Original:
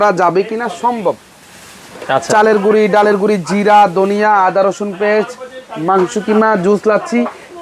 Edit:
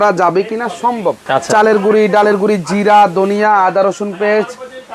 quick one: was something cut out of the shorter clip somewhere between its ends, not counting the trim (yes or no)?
yes